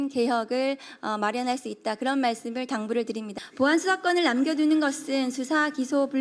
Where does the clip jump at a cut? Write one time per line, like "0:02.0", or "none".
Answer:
0:03.4